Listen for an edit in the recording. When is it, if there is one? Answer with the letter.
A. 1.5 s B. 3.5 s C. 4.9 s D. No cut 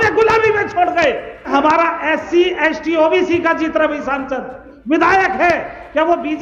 A